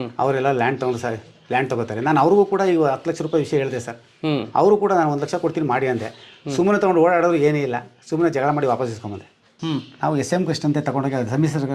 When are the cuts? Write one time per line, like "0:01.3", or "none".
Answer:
0:09.5